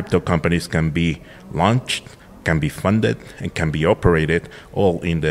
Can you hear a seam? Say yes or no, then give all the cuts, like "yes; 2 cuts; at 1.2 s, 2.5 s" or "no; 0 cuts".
no; 0 cuts